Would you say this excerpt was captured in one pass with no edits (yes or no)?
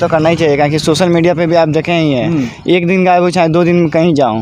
yes